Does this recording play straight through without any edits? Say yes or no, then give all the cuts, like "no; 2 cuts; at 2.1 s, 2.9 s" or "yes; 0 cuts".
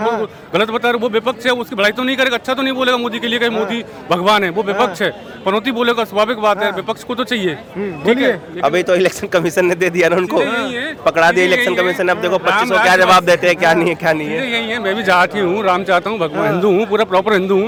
yes; 0 cuts